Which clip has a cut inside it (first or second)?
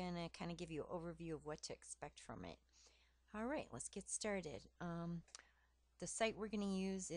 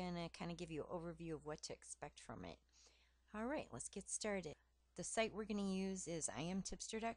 second